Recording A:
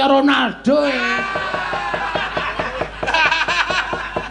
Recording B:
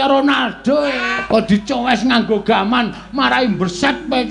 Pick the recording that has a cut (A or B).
B